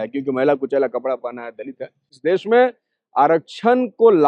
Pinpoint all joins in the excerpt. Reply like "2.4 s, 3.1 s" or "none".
2.2 s